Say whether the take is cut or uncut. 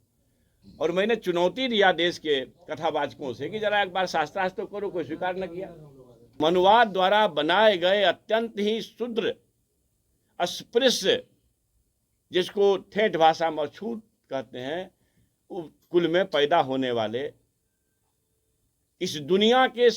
cut